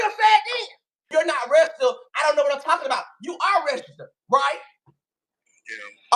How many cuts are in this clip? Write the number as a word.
one